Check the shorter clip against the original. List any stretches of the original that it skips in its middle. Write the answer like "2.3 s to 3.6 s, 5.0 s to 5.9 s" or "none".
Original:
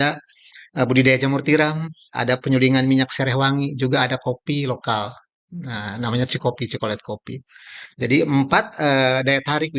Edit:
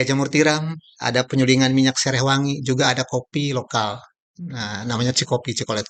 none